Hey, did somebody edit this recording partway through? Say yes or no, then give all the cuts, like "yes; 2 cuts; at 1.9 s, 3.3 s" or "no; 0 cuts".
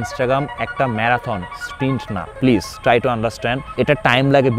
yes; 2 cuts; at 2.3 s, 3.6 s